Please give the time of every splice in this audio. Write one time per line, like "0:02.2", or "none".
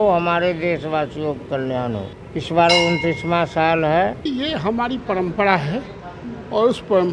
0:02.2
0:04.3